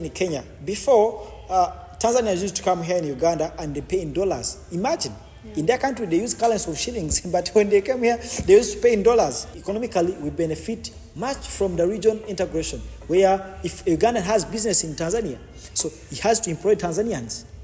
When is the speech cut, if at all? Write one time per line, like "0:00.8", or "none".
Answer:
0:09.6